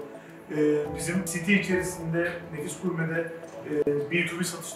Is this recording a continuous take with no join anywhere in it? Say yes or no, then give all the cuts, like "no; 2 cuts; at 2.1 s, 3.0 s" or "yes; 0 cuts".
no; 1 cut; at 1.3 s